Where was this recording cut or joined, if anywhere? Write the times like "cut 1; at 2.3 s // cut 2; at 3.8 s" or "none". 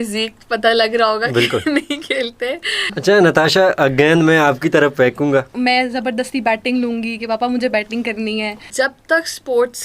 cut 1; at 2.9 s // cut 2; at 5.5 s // cut 3; at 8.6 s